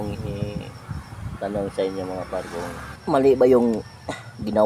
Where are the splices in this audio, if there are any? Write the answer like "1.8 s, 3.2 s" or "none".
2.9 s